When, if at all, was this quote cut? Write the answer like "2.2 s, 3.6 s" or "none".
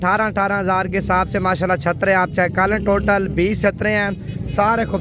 none

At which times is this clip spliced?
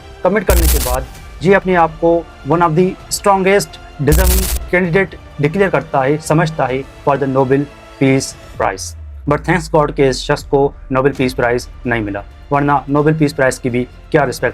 none

